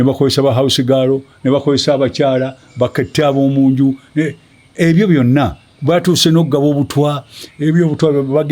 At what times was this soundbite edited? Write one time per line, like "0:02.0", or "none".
none